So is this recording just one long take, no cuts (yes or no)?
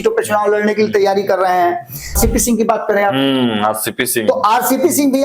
no